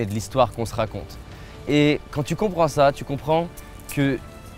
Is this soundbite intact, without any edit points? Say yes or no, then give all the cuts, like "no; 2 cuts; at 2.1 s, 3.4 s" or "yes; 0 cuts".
yes; 0 cuts